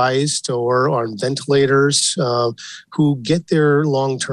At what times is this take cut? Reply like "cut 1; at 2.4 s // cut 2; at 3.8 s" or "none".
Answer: none